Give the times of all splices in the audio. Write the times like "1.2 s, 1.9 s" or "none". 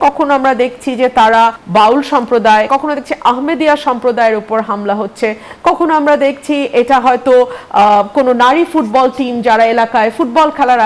1.6 s, 2.7 s